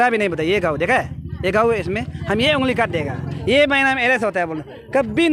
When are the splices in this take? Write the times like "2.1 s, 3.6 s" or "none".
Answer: none